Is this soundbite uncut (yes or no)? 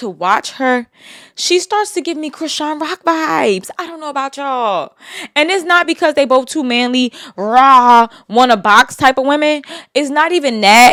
yes